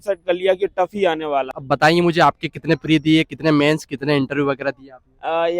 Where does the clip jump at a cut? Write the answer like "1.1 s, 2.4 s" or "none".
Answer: 1.6 s